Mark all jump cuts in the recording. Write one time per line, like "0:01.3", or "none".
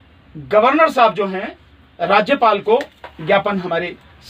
none